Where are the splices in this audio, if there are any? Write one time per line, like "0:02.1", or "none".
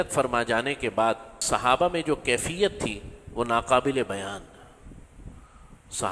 0:01.4